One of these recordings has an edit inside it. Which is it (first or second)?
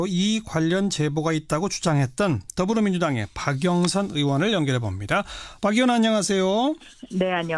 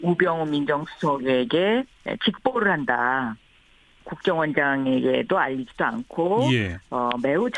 second